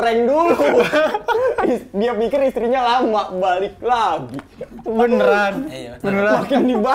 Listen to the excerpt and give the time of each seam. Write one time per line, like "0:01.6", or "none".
none

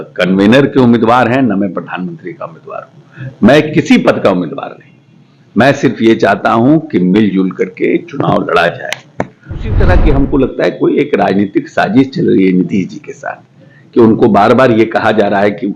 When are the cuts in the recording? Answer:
0:09.8

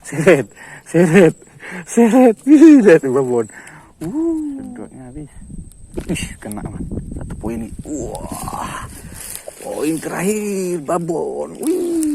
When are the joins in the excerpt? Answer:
0:04.6

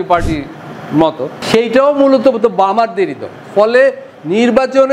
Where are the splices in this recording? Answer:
0:01.4

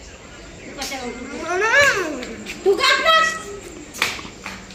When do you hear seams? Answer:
none

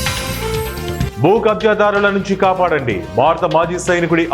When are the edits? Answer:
0:01.1

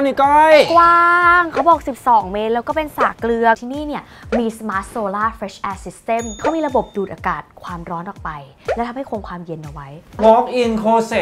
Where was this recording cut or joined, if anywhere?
0:03.6
0:06.4
0:10.2

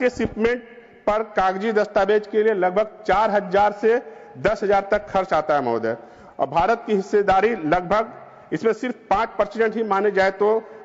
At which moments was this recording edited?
none

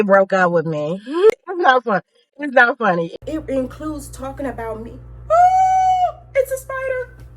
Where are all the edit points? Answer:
0:03.2

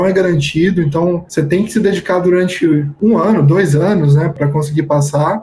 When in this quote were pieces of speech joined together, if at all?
0:04.3

